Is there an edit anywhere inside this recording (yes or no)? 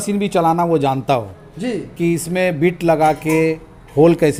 no